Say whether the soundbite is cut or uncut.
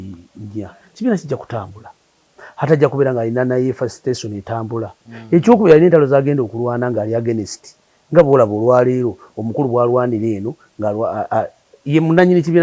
uncut